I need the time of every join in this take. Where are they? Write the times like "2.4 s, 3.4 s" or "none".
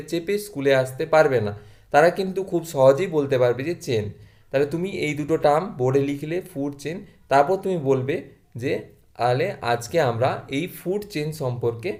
none